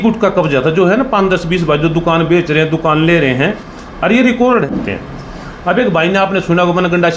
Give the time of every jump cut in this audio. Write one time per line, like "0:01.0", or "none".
0:04.7

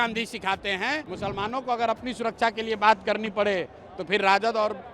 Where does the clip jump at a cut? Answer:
0:01.1

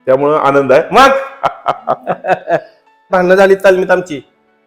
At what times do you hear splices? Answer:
0:03.1

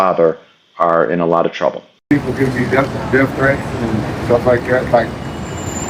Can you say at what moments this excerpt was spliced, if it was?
0:02.0

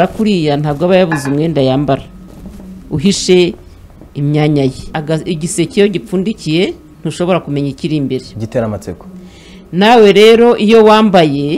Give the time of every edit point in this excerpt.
0:04.9

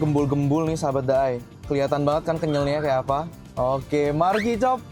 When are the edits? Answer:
none

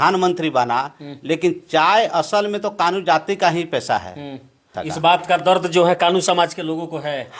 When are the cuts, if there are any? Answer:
0:04.7

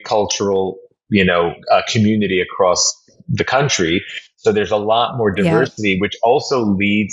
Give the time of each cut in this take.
none

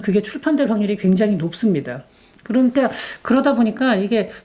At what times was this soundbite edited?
none

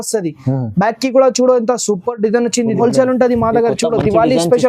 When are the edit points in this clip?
0:02.8

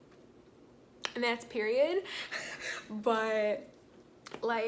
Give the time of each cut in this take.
none

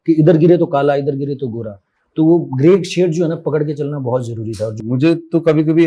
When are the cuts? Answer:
0:04.7

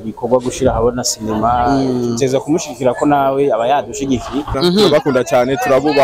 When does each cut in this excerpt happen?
0:04.5

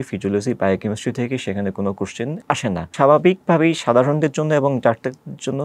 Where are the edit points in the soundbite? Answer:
0:02.8

